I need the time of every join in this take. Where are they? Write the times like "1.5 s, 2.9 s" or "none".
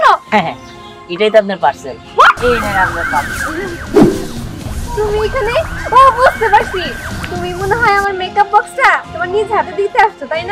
2.4 s